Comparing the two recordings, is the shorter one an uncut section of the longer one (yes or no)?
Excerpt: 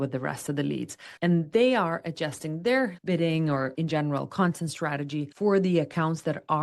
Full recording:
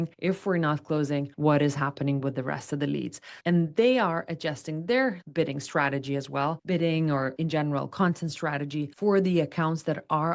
no